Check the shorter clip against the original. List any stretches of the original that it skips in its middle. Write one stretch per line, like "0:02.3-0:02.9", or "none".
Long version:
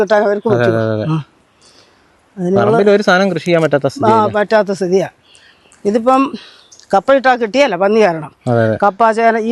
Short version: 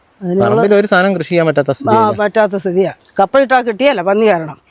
0:05.2-0:06.8